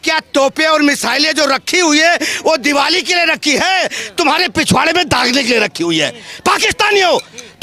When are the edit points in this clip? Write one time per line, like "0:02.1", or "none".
none